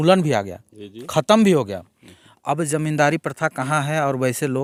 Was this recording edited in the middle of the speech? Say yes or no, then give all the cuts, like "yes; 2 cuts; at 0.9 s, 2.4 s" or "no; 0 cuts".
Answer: no; 0 cuts